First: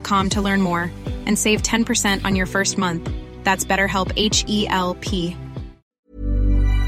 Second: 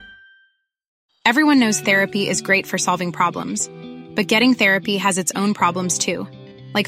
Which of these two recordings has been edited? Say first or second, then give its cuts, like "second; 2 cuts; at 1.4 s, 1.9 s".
first; 1 cut; at 5.9 s